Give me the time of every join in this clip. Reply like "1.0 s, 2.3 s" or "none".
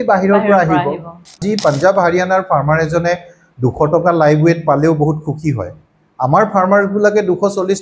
1.5 s